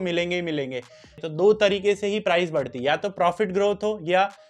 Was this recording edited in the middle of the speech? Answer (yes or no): yes